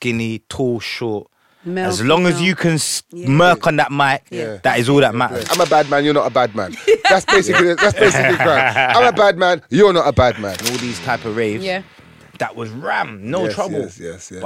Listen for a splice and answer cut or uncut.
cut